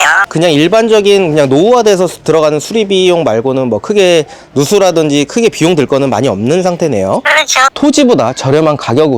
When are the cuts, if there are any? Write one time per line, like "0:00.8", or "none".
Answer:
0:07.7